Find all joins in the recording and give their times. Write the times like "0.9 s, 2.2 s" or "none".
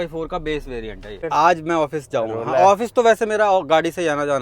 1.1 s